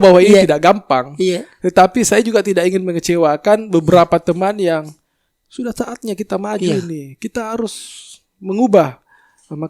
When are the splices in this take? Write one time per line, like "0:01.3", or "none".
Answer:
none

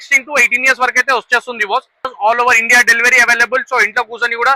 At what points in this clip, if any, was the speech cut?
0:02.1

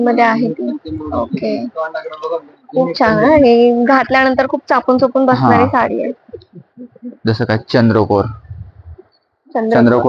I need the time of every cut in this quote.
none

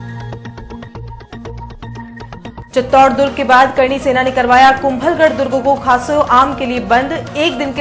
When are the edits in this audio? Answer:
0:02.7

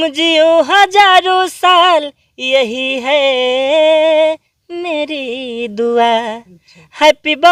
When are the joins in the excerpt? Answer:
none

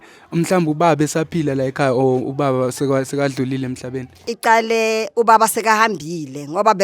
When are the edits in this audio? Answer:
0:04.3

